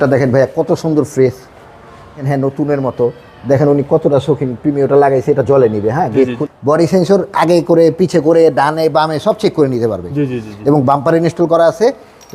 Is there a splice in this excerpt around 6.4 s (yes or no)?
yes